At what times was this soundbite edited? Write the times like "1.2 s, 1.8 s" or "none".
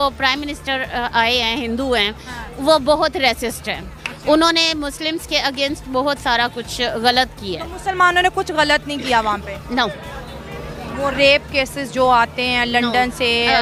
none